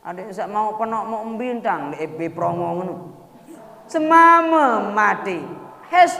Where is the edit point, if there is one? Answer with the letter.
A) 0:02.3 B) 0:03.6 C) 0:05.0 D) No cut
B